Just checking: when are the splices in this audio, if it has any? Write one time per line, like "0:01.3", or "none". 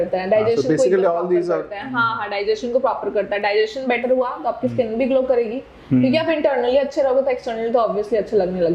none